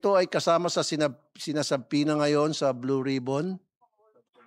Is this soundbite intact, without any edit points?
yes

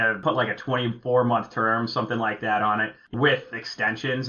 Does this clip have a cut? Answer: yes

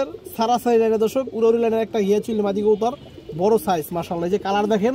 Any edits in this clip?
no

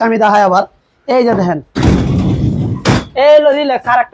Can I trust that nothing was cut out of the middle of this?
yes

